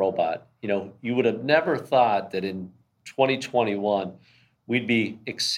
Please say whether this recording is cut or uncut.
uncut